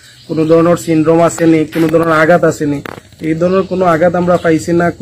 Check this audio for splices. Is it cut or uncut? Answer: uncut